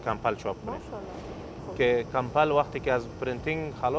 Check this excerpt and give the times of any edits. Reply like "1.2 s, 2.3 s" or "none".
1.6 s